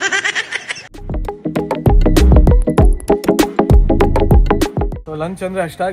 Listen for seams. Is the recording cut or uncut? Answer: cut